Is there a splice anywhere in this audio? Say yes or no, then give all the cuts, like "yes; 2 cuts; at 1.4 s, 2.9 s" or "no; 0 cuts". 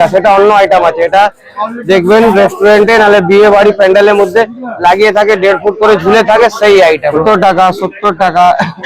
yes; 1 cut; at 7.2 s